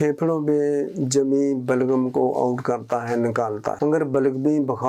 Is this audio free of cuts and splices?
yes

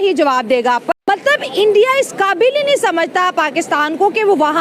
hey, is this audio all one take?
no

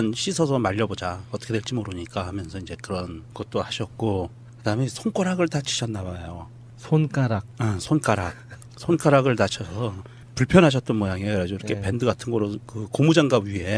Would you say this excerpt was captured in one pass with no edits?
yes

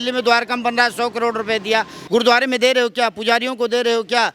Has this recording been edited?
yes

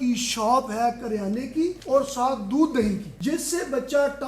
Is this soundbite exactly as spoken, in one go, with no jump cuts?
no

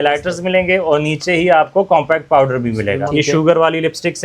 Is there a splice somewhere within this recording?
yes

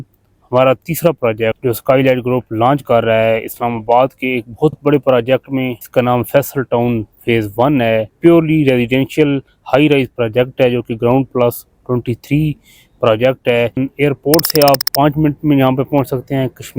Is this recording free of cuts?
no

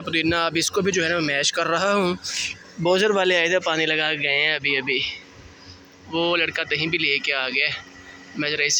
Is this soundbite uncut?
yes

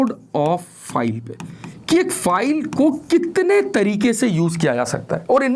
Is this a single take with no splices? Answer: yes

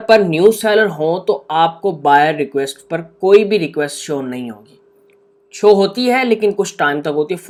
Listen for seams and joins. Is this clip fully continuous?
yes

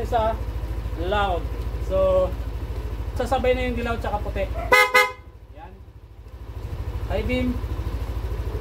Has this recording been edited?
yes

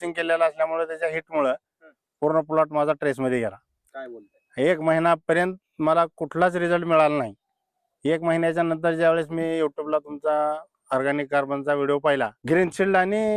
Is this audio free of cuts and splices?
no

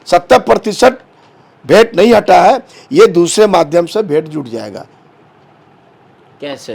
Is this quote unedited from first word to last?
yes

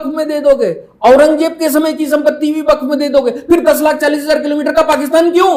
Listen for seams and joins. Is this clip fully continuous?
yes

